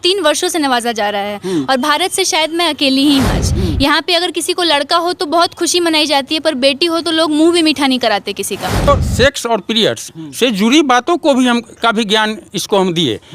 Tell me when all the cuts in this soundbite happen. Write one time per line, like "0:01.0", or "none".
0:03.4
0:08.9